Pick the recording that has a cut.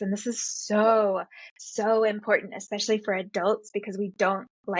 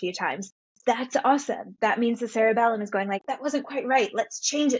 second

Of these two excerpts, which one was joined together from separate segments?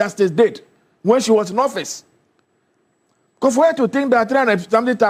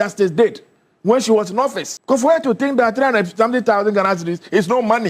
second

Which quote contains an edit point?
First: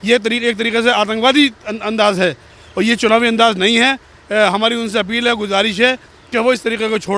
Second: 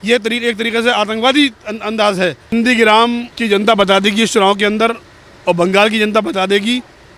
second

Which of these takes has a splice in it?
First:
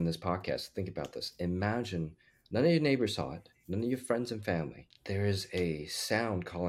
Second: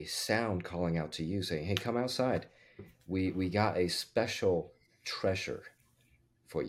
first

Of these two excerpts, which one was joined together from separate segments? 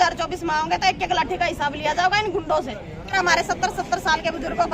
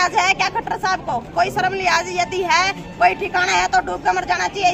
first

